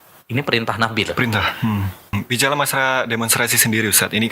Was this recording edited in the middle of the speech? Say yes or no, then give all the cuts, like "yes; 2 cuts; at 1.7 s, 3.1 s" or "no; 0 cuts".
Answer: yes; 1 cut; at 2.1 s